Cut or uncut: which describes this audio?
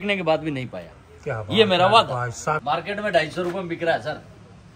cut